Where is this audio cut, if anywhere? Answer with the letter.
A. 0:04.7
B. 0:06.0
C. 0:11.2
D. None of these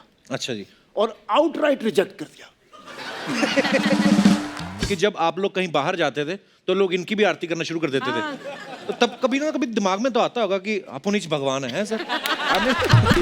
A